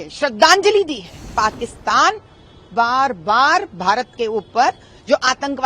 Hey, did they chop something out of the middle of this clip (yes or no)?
yes